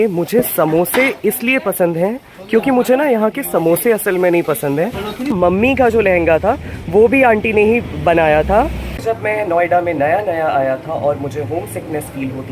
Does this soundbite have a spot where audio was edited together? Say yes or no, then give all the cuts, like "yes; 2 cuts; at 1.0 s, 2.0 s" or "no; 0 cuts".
yes; 2 cuts; at 5.3 s, 9.0 s